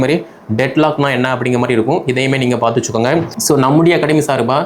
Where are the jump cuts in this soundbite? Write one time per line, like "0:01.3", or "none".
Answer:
0:03.3